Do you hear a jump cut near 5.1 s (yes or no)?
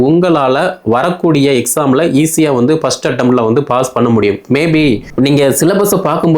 yes